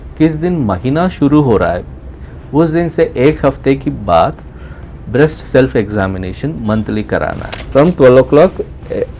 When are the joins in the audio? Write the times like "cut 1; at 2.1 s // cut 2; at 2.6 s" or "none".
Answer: cut 1; at 7.6 s